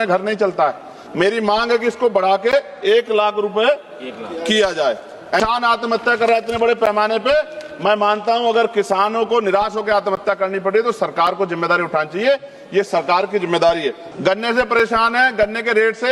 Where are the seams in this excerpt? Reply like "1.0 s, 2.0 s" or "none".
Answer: 5.4 s, 14.1 s